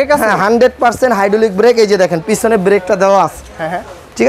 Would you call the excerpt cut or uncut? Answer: uncut